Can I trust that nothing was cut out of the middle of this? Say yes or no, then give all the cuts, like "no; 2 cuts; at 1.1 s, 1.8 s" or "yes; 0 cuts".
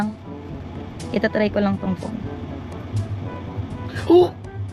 yes; 0 cuts